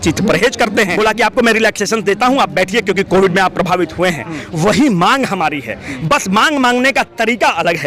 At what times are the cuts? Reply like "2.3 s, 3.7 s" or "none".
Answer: 0.9 s